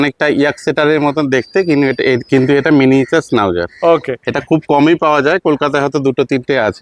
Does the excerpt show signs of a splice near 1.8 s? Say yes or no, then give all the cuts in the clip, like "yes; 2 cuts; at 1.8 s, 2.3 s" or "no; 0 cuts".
no; 0 cuts